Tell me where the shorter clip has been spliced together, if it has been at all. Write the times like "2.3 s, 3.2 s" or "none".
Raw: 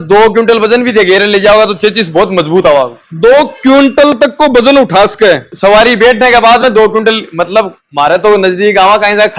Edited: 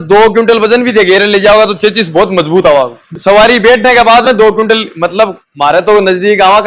3.1 s